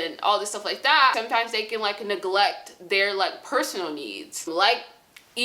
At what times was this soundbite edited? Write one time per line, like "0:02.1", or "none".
0:01.1
0:04.5